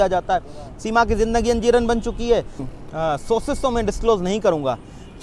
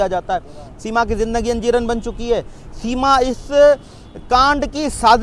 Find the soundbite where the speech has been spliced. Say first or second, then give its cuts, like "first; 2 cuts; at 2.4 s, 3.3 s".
first; 1 cut; at 2.7 s